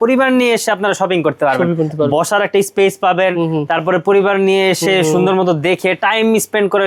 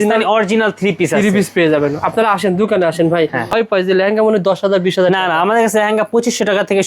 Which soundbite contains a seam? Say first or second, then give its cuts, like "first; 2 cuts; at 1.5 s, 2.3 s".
second; 1 cut; at 3.5 s